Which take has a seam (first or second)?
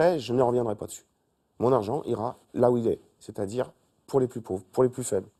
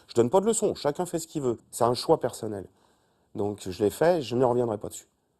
second